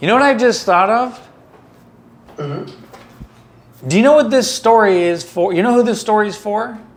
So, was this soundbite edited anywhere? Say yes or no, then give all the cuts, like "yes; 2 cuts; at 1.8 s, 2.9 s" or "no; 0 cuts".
no; 0 cuts